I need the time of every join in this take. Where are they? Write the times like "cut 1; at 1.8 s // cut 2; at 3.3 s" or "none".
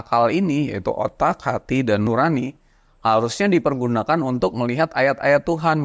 cut 1; at 2.1 s